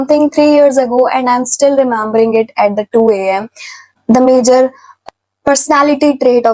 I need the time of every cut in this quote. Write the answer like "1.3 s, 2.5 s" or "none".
none